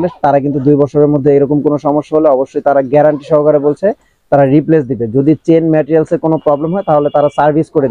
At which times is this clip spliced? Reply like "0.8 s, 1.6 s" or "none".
none

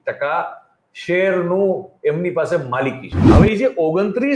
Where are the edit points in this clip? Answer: 3.1 s

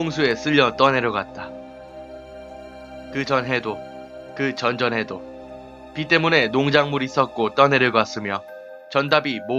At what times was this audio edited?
6.5 s

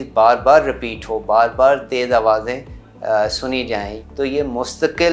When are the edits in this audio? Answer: 3.9 s

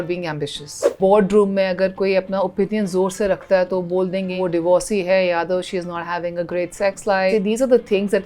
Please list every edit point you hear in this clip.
1.0 s, 4.4 s, 7.3 s

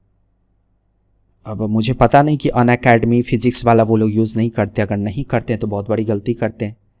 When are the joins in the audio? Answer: none

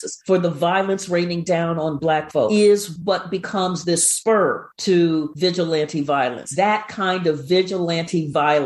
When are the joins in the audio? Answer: 2.5 s, 6.5 s

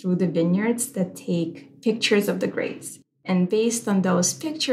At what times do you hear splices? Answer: 3.2 s

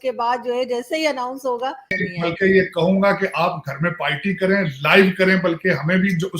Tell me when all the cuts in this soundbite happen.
2.0 s

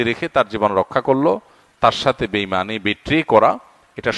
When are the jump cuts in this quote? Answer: none

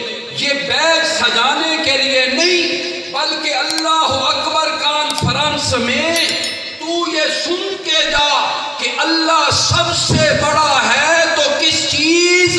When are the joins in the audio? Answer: none

